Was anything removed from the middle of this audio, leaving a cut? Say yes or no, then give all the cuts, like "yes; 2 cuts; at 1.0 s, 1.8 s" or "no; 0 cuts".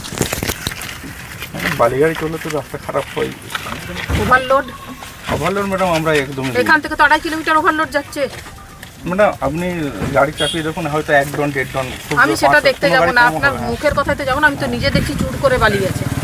no; 0 cuts